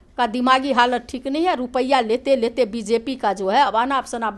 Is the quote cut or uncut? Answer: uncut